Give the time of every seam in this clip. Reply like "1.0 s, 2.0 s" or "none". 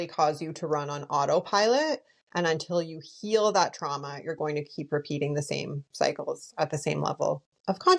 none